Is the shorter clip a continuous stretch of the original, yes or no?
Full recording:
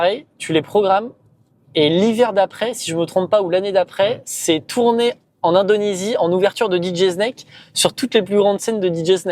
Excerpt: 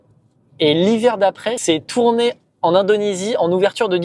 no